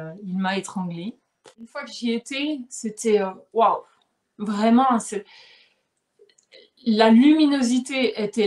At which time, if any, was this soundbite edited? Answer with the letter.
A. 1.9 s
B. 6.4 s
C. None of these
A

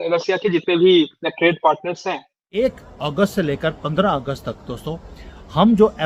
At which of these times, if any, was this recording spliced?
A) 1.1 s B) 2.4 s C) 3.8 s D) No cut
B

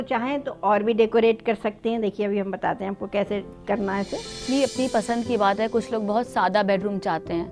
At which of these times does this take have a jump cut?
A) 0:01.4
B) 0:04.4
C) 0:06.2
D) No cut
B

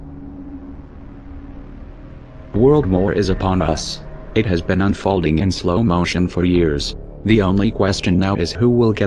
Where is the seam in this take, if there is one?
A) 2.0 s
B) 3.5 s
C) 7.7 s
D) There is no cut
B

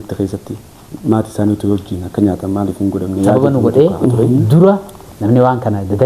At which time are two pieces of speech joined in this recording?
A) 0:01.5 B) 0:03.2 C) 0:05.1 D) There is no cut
B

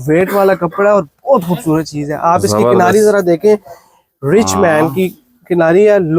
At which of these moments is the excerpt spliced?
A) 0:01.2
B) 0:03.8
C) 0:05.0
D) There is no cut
D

